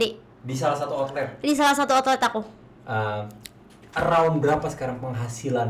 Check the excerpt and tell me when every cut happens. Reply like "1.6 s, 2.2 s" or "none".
2.7 s